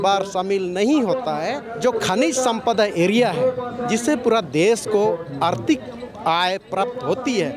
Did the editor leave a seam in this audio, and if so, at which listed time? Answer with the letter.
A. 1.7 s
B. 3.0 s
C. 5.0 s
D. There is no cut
A